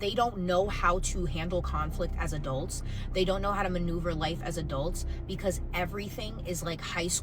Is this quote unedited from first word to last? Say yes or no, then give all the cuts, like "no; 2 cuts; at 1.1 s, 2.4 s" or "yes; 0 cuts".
yes; 0 cuts